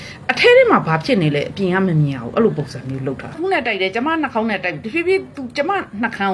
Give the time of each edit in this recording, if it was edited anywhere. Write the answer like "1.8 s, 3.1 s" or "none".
3.4 s